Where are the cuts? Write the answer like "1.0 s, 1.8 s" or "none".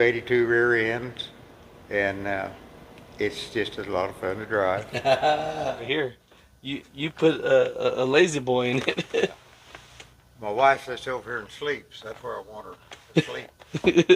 5.8 s